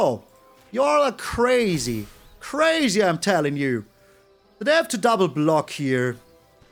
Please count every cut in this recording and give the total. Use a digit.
0